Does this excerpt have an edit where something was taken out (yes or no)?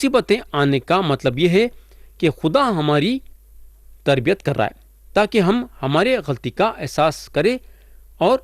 no